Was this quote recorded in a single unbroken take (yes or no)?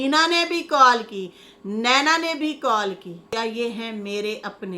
no